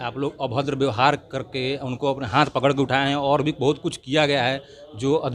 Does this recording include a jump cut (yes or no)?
no